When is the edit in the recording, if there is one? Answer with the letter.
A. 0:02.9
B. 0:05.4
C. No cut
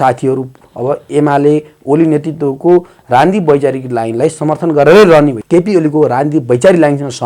B